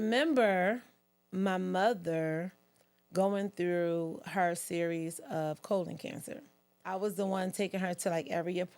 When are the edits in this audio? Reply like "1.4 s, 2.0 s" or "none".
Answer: 6.9 s